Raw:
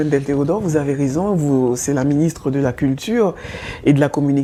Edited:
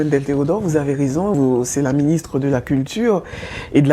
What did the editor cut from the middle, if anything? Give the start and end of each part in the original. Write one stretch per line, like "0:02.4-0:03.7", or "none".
0:01.3-0:01.5